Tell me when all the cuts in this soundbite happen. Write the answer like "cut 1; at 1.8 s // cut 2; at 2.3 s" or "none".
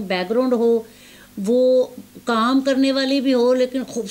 none